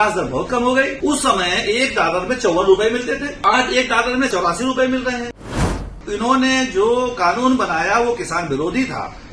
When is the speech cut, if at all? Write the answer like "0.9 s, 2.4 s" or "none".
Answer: 0.9 s, 3.3 s, 4.3 s, 5.9 s